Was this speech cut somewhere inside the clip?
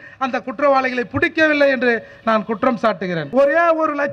yes; 1 cut; at 3.2 s

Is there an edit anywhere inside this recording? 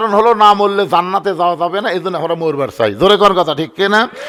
no; 0 cuts

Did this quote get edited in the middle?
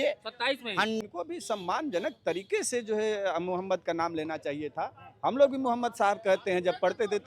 yes; 1 cut; at 1.0 s

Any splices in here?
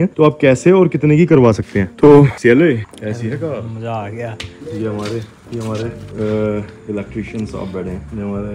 no; 0 cuts

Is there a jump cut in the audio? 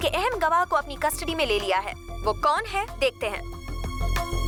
no; 0 cuts

